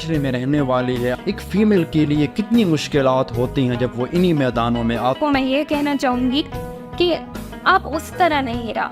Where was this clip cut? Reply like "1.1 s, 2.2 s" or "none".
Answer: 1.1 s, 5.2 s